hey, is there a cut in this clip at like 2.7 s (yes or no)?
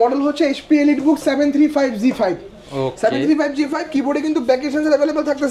no